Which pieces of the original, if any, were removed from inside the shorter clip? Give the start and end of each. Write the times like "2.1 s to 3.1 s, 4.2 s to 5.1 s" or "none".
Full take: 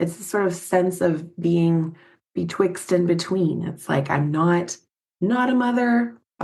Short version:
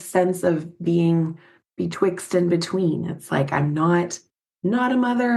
none